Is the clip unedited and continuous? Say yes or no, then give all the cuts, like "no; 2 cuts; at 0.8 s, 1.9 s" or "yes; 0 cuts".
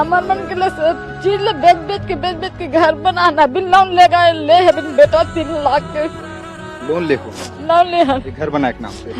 yes; 0 cuts